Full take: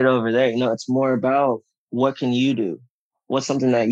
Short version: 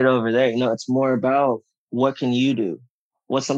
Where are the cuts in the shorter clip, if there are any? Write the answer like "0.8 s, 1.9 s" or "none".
none